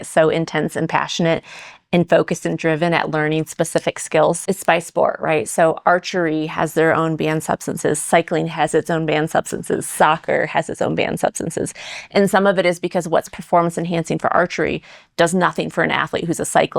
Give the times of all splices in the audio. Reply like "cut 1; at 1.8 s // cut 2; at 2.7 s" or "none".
cut 1; at 4.4 s

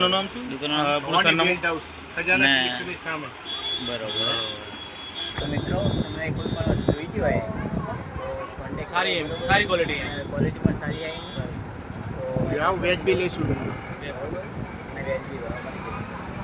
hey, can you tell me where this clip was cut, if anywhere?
none

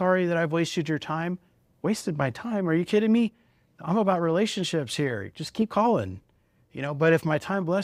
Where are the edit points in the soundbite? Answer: none

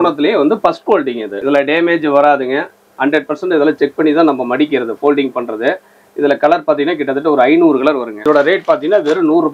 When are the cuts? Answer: cut 1; at 1.3 s // cut 2; at 8.2 s

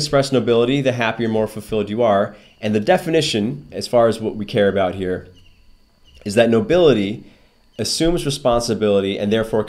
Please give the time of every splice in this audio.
none

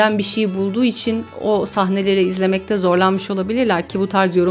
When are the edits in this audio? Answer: none

